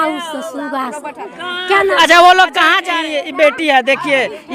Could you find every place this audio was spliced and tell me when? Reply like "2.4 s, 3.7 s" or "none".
2.8 s